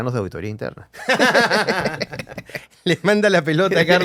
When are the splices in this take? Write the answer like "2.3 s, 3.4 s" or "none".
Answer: none